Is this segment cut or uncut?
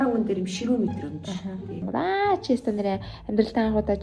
cut